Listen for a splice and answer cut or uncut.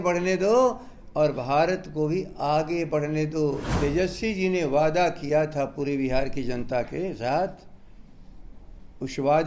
cut